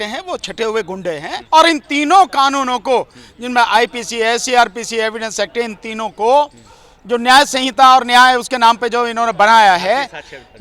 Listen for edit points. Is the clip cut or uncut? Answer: cut